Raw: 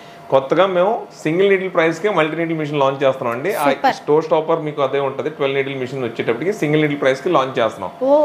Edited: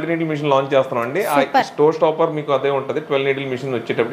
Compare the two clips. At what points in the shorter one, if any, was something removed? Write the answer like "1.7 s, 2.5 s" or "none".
none